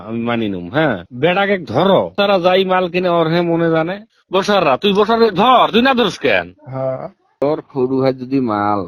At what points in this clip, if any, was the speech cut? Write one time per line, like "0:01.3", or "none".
0:04.0
0:07.4